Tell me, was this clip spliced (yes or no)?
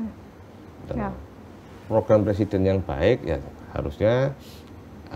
no